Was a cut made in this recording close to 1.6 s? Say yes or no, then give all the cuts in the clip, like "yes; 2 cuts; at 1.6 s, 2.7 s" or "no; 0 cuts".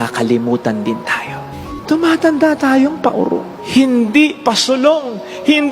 yes; 1 cut; at 1.6 s